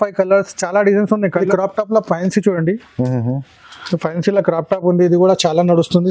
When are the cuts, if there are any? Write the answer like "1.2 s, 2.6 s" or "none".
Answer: 1.5 s